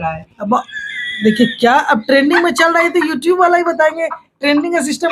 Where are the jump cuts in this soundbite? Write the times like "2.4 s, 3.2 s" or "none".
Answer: none

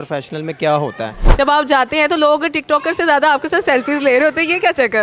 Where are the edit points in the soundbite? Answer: 1.2 s

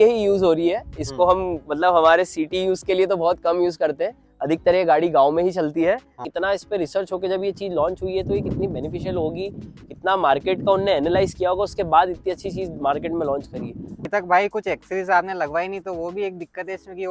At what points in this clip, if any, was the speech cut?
6.2 s, 14.0 s

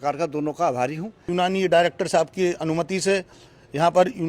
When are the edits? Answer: 1.3 s

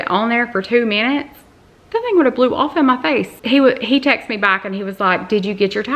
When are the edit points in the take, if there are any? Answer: none

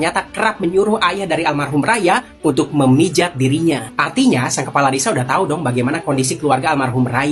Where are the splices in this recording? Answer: none

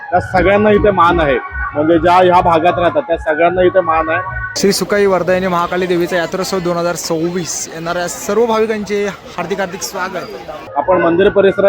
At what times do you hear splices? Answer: 4.4 s, 10.6 s

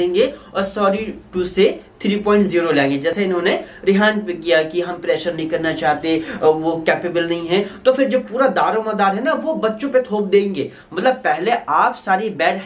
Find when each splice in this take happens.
none

